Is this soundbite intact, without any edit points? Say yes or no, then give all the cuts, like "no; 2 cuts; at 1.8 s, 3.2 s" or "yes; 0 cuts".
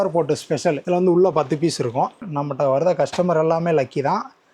no; 1 cut; at 2.2 s